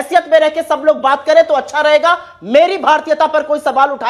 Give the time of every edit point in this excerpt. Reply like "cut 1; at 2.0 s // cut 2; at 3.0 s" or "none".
none